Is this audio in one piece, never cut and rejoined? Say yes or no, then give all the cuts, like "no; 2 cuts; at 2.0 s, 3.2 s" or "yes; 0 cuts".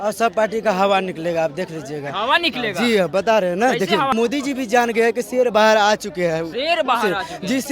no; 1 cut; at 4.1 s